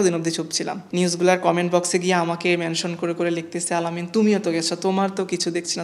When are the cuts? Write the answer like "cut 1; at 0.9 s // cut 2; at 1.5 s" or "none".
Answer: none